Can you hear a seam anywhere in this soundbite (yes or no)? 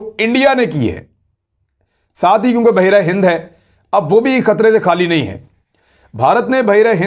no